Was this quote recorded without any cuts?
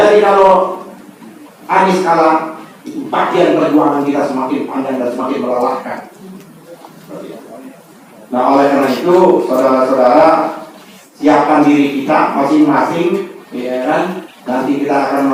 yes; 0 cuts

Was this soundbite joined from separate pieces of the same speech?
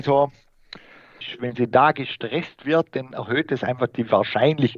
yes; 1 cut; at 1.3 s

